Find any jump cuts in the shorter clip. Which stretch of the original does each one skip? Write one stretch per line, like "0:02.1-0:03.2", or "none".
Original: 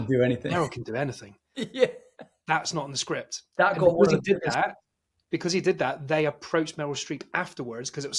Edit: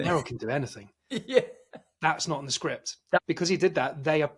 0:03.6-0:05.2